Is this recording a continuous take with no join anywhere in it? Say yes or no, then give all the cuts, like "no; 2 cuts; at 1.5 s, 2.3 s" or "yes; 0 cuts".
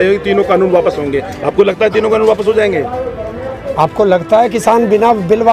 yes; 0 cuts